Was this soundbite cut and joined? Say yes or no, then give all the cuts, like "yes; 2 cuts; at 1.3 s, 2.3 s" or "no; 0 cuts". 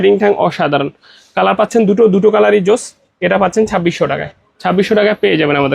no; 0 cuts